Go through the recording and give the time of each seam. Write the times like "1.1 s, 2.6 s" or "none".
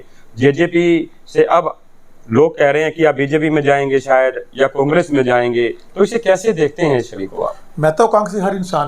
none